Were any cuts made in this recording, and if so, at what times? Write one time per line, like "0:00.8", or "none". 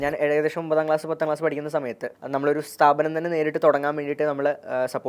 0:02.1

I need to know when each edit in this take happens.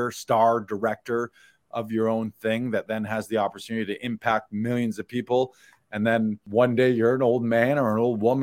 0:06.4

